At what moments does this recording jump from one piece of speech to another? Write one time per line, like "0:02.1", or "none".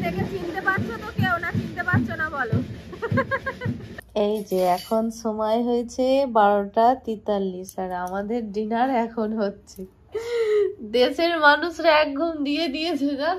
0:04.0